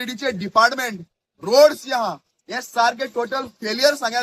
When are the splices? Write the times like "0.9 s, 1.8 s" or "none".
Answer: none